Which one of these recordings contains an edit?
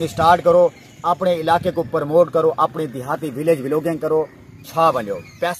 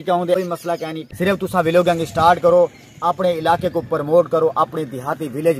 second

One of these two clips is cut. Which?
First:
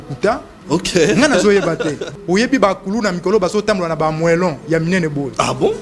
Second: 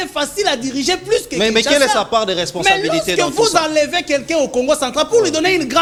first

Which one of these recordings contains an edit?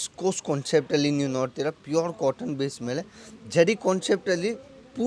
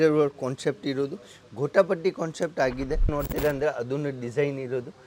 second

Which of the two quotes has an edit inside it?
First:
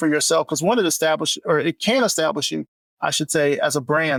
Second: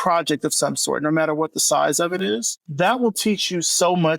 second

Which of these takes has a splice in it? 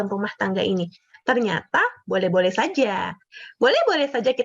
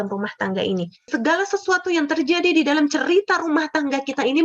second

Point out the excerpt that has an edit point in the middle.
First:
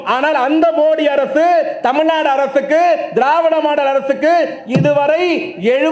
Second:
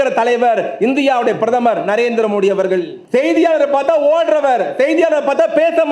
second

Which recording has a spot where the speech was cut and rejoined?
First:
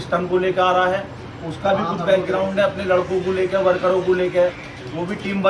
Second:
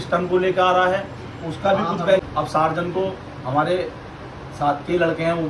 second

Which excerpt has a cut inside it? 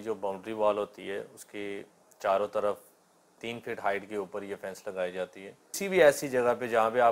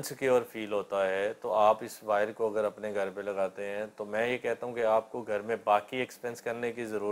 first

